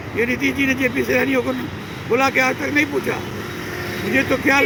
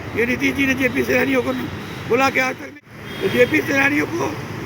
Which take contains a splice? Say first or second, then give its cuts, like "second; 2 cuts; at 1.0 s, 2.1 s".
second; 1 cut; at 2.6 s